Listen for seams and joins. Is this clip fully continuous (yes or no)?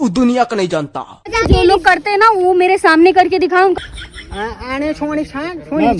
no